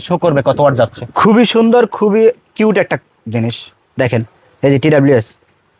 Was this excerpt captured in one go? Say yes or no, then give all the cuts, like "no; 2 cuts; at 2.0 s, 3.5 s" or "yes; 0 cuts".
no; 1 cut; at 1.0 s